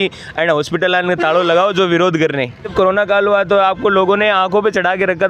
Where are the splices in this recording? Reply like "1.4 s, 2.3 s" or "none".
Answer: 2.7 s